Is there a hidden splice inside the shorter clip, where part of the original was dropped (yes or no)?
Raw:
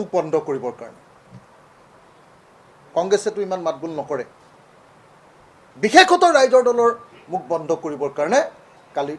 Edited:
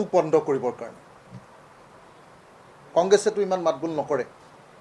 no